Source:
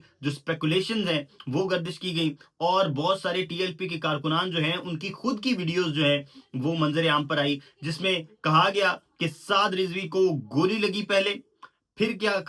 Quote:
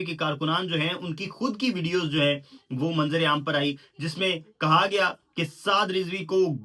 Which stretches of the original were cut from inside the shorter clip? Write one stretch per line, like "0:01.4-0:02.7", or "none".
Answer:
none